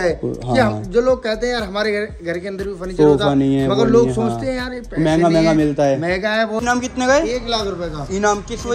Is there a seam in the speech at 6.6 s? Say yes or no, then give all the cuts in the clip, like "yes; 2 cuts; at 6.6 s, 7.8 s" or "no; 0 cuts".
yes; 1 cut; at 6.6 s